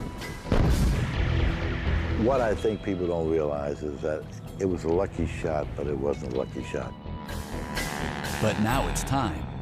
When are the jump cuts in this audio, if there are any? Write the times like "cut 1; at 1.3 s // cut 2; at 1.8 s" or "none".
cut 1; at 7.9 s